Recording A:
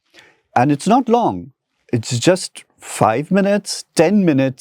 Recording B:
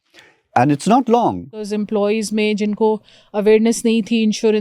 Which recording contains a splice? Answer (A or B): B